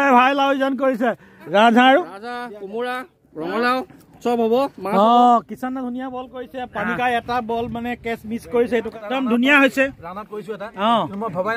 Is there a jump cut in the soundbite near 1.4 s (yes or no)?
yes